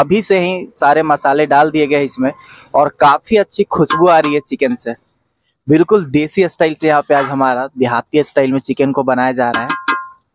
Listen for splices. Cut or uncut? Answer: uncut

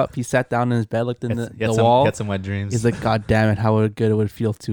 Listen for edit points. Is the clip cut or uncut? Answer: uncut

